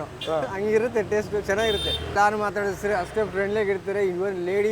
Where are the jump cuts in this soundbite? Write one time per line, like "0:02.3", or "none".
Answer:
0:02.2